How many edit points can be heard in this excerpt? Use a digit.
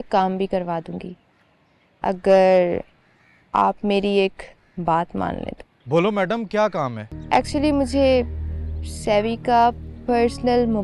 1